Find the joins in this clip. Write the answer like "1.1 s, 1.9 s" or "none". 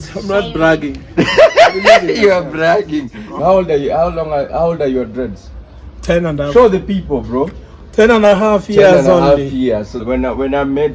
3.4 s, 9.9 s

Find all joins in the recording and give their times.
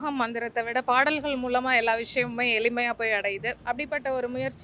3.5 s

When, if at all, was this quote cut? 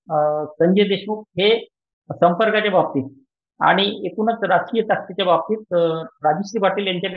none

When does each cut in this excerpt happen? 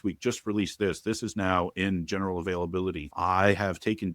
3.1 s

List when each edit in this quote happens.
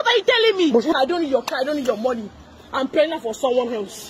0.9 s

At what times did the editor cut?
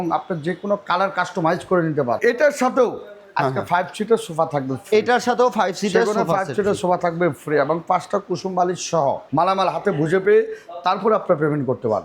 2.2 s, 9.2 s

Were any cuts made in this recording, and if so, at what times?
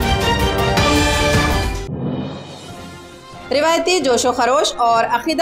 3.0 s

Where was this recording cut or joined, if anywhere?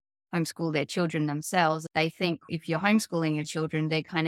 2.0 s

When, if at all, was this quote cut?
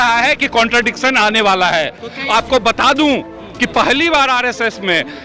none

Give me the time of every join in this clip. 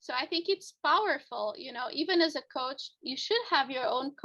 none

